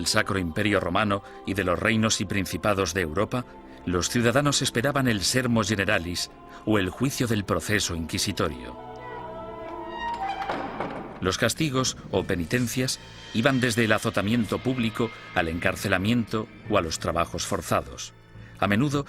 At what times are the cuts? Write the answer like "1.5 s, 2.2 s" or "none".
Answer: 6.6 s